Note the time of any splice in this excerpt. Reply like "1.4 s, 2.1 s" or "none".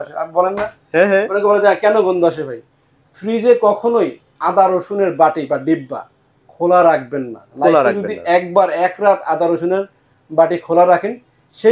none